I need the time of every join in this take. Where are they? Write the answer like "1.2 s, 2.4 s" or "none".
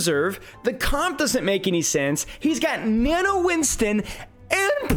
none